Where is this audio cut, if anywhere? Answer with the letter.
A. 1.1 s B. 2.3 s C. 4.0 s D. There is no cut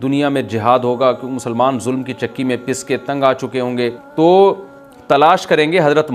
C